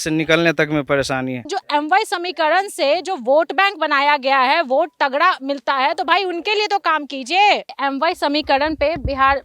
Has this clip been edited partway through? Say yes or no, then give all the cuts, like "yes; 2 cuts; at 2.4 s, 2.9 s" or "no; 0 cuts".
yes; 2 cuts; at 1.4 s, 7.7 s